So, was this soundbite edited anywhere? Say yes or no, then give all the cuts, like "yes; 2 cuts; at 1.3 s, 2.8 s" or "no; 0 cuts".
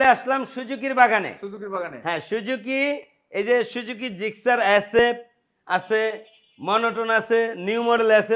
no; 0 cuts